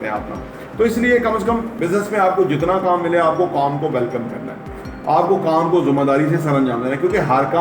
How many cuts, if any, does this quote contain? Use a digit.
1